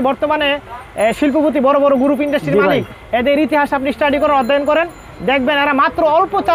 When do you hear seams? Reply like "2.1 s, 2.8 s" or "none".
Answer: none